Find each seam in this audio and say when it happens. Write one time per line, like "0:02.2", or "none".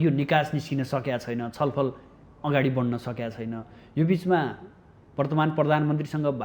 none